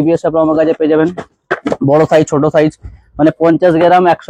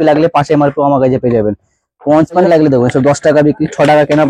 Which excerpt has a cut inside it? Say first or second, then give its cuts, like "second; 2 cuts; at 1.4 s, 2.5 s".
second; 1 cut; at 2.4 s